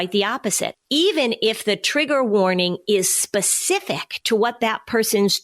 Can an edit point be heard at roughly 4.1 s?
yes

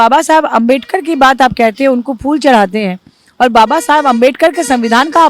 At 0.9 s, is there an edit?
no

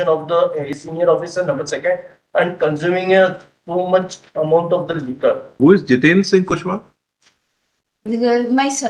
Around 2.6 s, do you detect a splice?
no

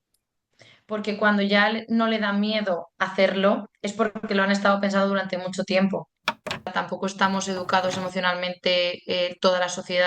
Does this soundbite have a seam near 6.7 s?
yes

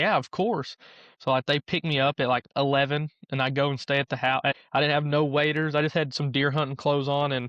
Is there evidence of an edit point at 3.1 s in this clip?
no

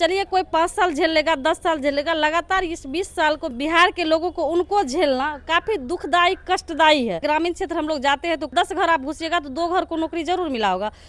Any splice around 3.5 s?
yes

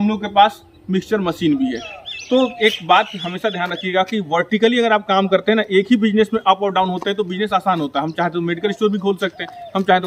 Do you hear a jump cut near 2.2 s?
no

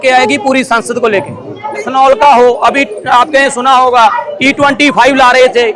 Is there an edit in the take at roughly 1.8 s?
yes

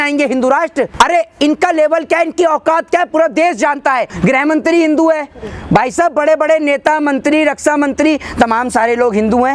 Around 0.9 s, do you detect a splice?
yes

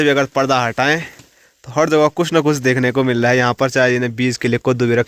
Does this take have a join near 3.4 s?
no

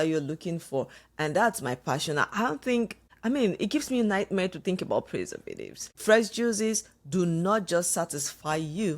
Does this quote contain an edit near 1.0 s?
no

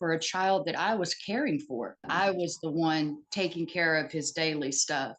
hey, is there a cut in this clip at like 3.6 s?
no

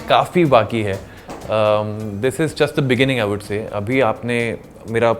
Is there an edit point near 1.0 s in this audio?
no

